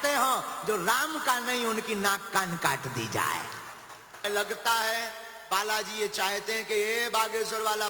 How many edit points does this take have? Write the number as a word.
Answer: one